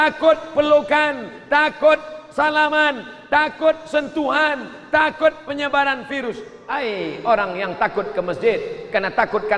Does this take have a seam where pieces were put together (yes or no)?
yes